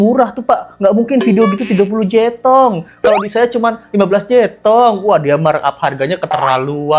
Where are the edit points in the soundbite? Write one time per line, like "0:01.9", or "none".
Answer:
none

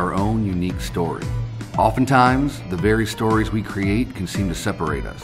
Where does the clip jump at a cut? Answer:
none

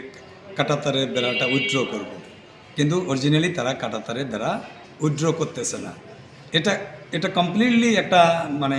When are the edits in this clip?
none

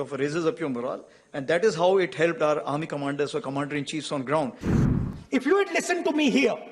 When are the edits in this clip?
0:04.7

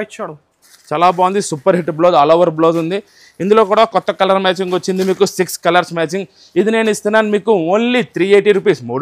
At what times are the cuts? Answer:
none

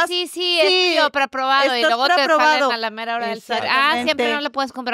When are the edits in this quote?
none

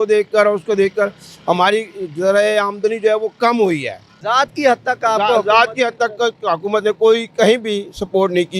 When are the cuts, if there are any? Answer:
0:04.1

